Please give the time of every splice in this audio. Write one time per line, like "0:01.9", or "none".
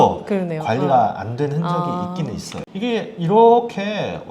0:02.6